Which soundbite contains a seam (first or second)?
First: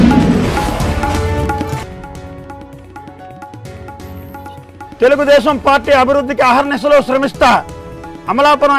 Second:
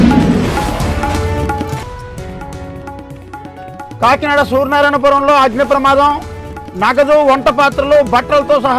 first